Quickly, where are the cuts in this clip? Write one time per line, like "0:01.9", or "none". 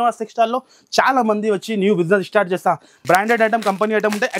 0:02.9